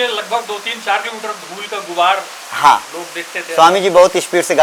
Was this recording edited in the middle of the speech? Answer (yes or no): no